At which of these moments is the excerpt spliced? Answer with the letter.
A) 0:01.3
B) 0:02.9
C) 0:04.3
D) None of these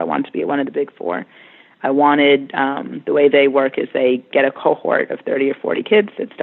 D